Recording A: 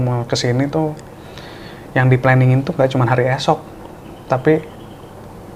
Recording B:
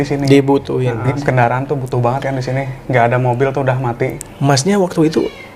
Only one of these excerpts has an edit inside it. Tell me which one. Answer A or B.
B